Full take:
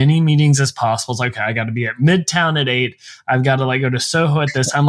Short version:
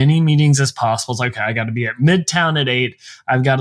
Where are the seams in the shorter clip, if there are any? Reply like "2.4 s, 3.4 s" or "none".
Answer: none